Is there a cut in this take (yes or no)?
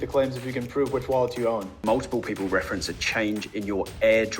yes